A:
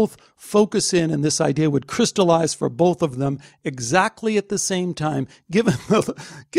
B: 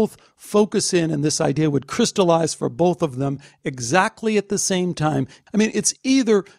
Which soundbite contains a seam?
B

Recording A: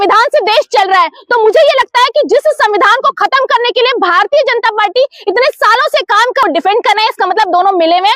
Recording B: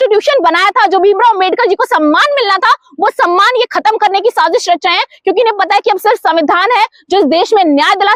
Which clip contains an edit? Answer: A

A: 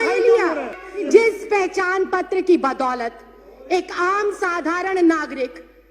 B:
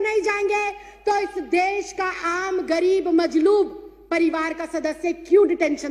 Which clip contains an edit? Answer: A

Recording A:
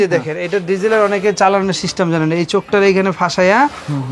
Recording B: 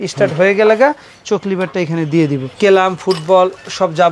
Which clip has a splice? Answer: B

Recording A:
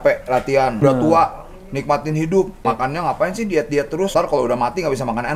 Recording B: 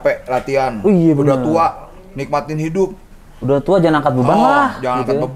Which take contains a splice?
A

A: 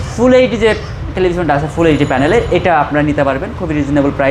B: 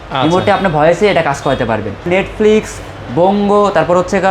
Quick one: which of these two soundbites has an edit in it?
B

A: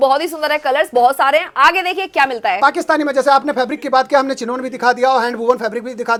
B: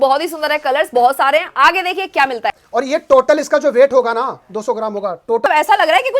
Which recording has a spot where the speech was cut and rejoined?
B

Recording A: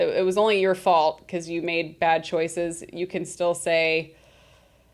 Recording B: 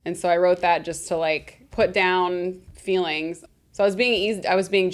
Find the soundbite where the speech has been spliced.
B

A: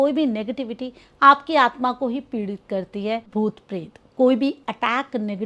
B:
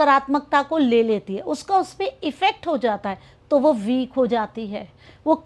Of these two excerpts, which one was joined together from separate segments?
A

